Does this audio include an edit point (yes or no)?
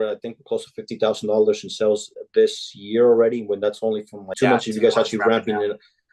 yes